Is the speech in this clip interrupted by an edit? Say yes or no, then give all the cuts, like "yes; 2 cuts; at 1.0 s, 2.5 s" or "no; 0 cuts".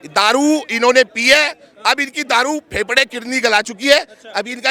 no; 0 cuts